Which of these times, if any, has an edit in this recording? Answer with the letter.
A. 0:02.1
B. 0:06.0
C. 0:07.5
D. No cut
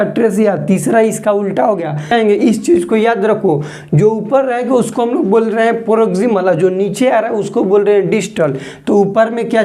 A